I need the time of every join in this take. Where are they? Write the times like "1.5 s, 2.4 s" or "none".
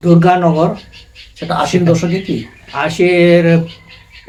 none